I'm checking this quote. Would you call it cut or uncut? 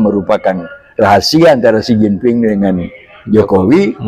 uncut